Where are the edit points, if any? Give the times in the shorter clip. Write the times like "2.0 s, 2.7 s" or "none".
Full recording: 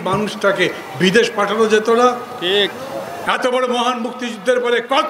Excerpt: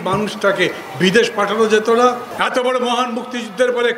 2.3 s